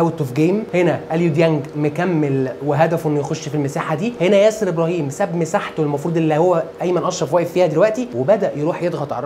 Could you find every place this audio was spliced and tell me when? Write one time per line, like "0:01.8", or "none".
none